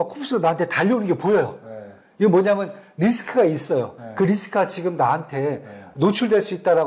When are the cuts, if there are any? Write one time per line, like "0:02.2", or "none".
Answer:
none